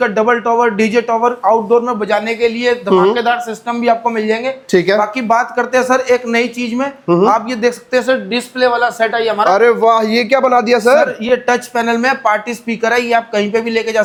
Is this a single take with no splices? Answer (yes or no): yes